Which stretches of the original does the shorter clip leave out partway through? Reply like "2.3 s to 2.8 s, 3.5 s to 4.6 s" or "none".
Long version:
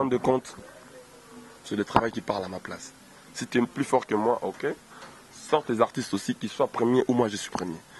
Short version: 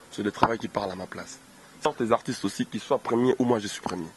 3.4 s to 5.5 s